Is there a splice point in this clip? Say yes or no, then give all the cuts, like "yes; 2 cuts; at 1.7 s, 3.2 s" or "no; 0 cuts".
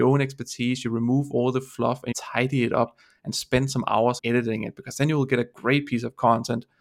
yes; 2 cuts; at 2.0 s, 4.2 s